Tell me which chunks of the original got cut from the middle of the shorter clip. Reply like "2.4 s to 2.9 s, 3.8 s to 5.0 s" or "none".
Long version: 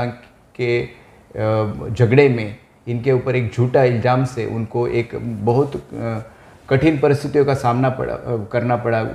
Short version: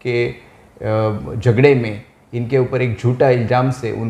none